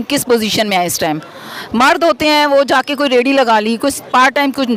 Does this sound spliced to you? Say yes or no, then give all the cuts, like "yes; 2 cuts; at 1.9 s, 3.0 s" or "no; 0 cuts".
no; 0 cuts